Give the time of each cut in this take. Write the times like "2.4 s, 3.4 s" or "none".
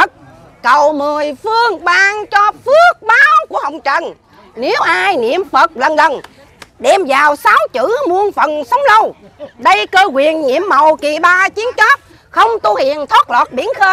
none